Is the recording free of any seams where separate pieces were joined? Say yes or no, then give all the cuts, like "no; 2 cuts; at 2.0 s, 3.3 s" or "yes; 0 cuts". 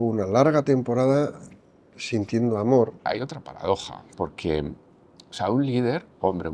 no; 1 cut; at 3.1 s